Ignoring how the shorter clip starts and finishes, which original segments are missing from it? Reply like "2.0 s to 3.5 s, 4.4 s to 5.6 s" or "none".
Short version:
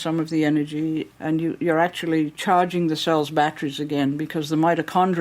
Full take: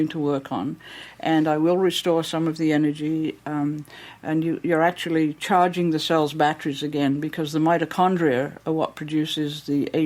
3.4 s to 4.2 s